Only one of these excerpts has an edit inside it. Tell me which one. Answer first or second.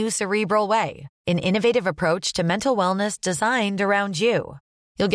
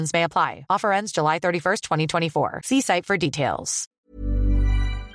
second